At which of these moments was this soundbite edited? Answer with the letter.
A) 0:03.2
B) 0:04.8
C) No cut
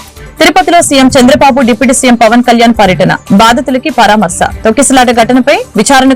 C